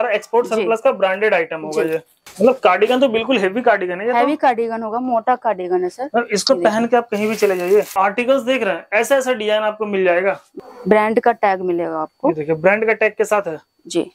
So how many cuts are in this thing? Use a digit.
3